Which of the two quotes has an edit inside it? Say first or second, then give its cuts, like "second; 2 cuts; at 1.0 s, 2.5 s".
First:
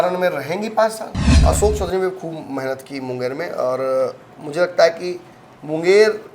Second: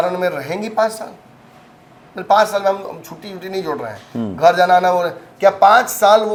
first; 1 cut; at 1.4 s